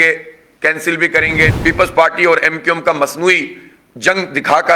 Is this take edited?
yes; 1 cut; at 1.5 s

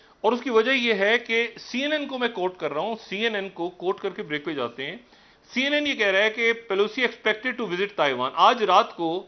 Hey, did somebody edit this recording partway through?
no; 0 cuts

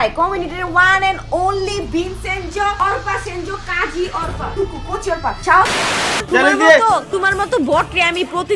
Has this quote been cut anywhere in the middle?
yes; 1 cut; at 6.2 s

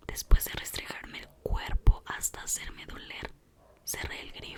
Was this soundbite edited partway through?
no; 0 cuts

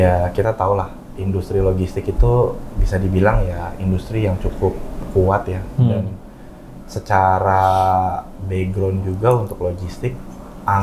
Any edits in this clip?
no; 0 cuts

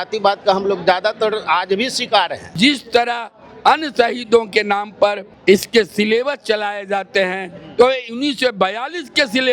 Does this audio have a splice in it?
yes; 2 cuts; at 2.6 s, 5.3 s

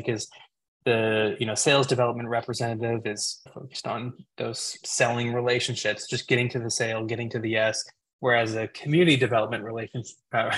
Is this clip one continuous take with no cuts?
yes; 0 cuts

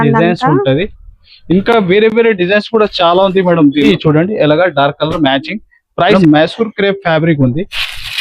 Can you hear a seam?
yes; 2 cuts; at 3.9 s, 6.1 s

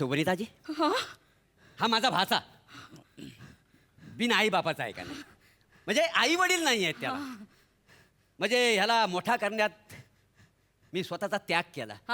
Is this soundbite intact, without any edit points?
yes; 0 cuts

